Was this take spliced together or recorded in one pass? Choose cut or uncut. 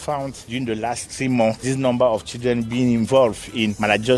uncut